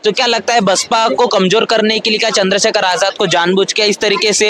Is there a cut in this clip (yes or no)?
no